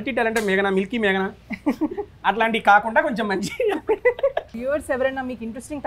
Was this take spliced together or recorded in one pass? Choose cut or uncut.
cut